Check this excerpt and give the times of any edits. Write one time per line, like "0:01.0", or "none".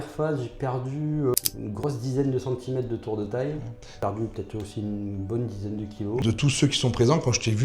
0:01.3
0:03.9
0:06.2